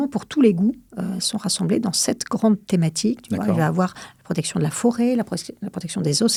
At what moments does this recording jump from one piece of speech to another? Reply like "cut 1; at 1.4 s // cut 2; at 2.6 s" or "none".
none